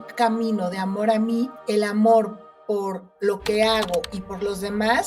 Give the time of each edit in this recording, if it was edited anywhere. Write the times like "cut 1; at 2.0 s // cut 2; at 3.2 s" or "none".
cut 1; at 1.6 s